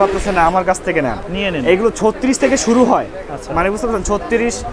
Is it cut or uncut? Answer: uncut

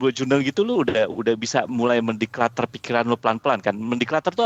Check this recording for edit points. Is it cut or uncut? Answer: uncut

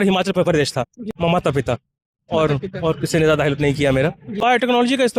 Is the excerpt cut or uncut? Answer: cut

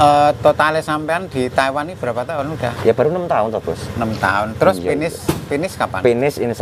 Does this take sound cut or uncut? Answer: uncut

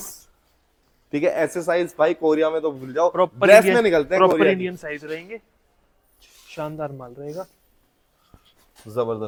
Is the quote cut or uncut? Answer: uncut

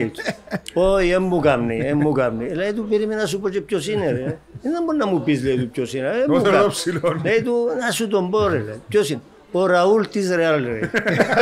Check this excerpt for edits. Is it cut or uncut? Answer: uncut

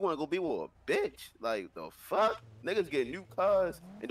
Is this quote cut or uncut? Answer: uncut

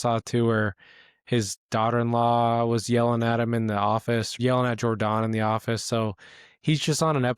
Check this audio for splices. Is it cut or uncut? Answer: cut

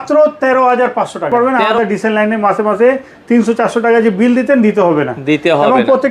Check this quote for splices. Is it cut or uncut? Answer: cut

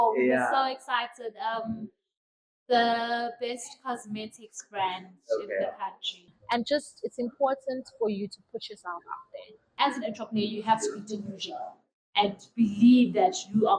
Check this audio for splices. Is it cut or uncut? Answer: cut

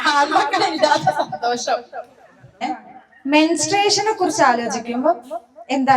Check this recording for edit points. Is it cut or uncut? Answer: cut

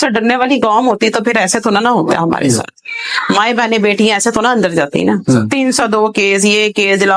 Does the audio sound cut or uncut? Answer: cut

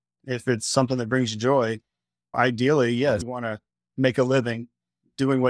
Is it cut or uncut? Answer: uncut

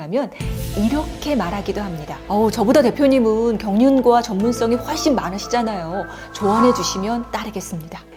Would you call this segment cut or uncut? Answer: uncut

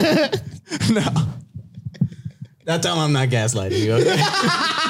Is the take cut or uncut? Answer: uncut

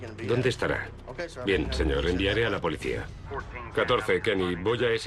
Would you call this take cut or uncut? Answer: cut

